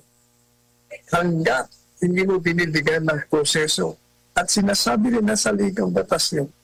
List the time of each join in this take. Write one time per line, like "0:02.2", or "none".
none